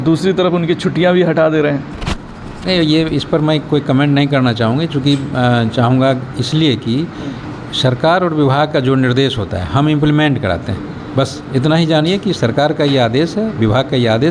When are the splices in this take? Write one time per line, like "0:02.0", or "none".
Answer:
none